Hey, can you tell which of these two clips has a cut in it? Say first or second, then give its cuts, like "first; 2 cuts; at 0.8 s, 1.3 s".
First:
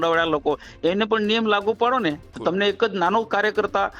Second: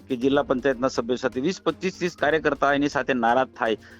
first; 1 cut; at 2.3 s